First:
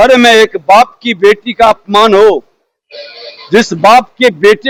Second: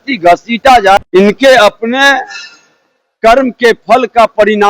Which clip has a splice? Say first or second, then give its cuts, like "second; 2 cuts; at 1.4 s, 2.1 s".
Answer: second; 1 cut; at 1.0 s